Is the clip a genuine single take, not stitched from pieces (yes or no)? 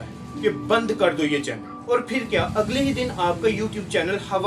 yes